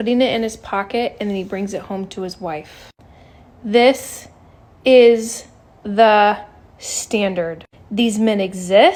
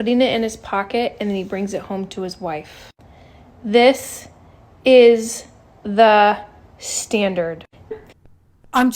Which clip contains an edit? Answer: second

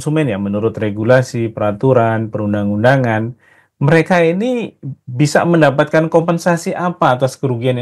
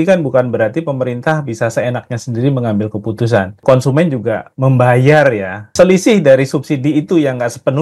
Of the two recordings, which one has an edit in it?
second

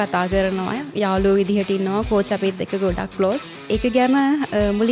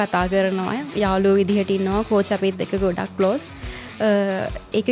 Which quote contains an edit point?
first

